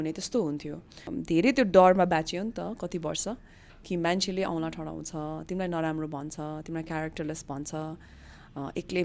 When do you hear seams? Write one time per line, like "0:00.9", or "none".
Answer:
0:01.1